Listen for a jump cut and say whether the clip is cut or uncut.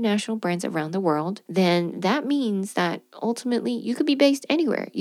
cut